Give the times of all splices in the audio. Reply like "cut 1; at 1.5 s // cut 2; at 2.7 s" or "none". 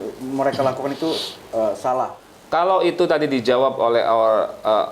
cut 1; at 2.3 s